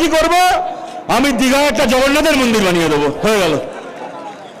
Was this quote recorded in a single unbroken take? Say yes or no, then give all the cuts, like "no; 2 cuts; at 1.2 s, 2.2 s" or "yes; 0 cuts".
yes; 0 cuts